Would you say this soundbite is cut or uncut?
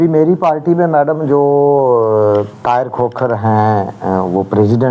uncut